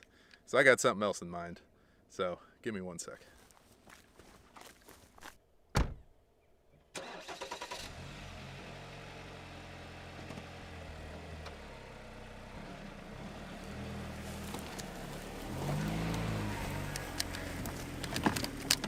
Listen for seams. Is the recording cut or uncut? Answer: uncut